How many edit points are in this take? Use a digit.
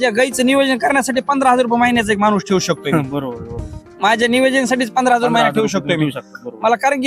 0